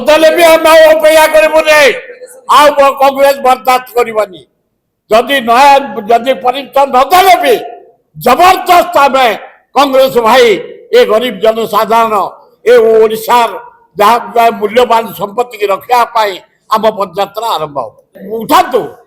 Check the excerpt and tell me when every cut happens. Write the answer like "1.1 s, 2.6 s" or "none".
18.1 s